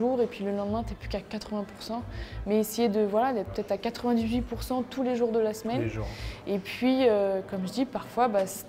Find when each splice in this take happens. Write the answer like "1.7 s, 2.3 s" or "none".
none